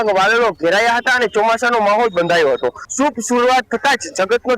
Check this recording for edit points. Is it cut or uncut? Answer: cut